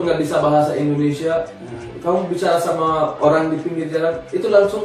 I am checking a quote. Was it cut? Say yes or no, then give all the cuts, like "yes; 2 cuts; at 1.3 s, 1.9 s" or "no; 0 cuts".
no; 0 cuts